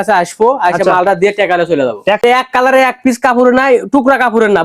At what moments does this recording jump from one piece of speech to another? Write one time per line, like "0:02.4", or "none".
0:02.2